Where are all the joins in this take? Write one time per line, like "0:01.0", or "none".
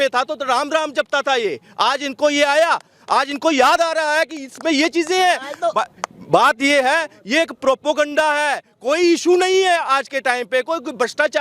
none